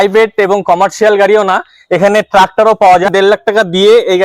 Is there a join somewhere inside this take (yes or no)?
yes